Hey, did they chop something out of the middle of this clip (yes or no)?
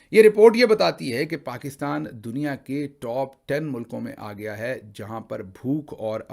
no